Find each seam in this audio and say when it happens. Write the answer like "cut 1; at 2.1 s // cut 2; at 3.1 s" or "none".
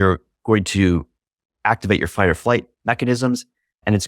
cut 1; at 2.7 s